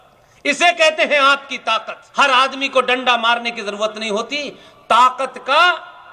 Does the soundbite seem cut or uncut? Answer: cut